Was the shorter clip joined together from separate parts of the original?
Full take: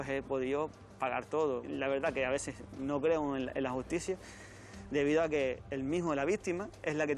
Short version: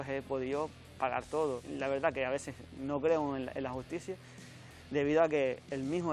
no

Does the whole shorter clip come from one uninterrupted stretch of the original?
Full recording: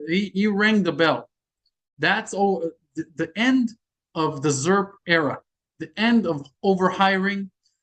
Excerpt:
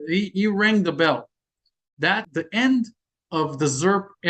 no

